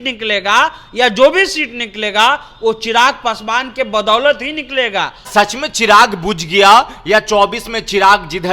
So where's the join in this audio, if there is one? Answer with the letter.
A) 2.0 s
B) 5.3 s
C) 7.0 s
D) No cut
B